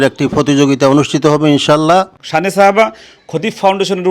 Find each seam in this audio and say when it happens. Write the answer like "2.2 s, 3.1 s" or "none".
2.2 s